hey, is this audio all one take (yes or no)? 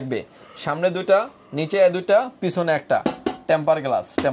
yes